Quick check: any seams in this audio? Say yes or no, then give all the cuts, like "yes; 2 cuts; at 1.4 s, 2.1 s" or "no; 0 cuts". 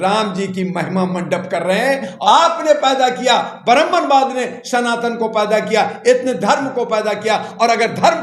yes; 1 cut; at 2.1 s